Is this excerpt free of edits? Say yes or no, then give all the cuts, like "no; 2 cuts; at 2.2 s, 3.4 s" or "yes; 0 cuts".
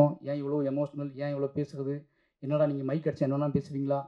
yes; 0 cuts